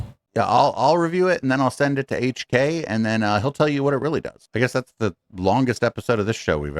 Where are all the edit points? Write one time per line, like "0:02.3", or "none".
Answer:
0:04.4